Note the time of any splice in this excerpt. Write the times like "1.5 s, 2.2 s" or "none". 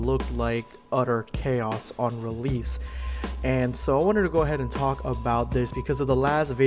5.3 s